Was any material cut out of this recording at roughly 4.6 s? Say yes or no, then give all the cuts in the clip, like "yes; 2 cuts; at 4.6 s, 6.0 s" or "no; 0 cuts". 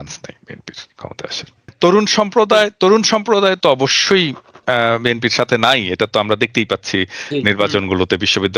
no; 1 cut; at 1.7 s